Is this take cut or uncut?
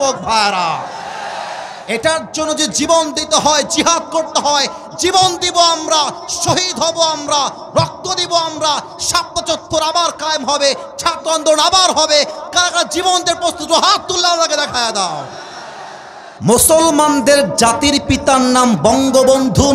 cut